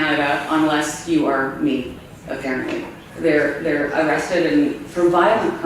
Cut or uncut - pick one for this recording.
cut